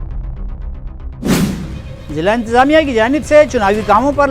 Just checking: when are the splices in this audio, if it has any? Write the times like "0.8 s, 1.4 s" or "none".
1.5 s